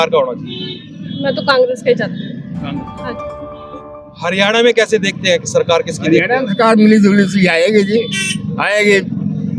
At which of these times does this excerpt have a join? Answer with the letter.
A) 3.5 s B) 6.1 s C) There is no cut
A